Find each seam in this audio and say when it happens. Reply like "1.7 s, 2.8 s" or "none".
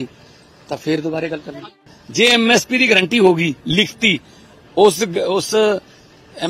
2.0 s